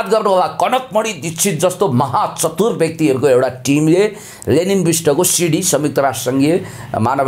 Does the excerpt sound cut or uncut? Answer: uncut